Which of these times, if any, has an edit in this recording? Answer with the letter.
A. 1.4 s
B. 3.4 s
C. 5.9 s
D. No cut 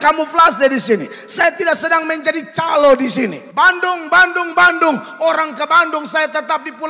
B